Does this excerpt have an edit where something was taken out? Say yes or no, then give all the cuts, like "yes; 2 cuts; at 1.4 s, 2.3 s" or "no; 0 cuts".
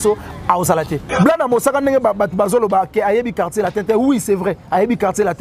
yes; 1 cut; at 1.0 s